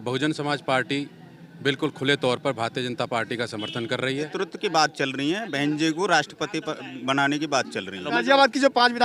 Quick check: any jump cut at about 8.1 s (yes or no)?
yes